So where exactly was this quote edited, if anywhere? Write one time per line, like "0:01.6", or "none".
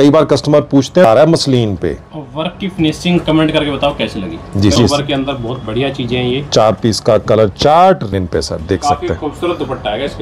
0:01.0
0:04.8
0:08.1